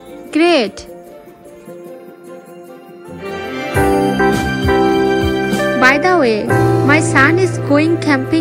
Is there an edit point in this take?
no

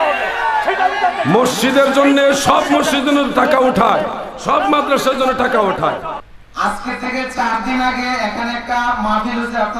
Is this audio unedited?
no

